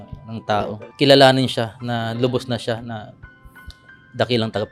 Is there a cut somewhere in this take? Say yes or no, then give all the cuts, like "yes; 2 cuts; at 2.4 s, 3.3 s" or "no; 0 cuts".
no; 0 cuts